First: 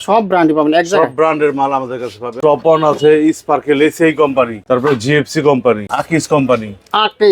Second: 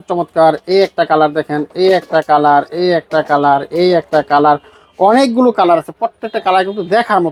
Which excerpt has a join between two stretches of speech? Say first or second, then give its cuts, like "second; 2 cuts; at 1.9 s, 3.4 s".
first; 3 cuts; at 2.4 s, 4.6 s, 6.0 s